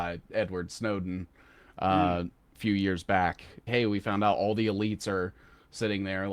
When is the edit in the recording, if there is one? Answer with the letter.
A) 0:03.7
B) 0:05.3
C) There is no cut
A